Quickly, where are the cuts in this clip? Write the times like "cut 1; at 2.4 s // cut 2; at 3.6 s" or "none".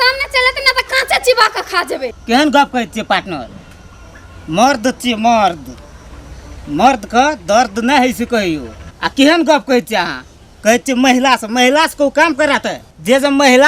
cut 1; at 2.2 s